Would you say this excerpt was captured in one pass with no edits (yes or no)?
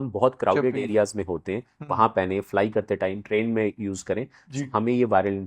yes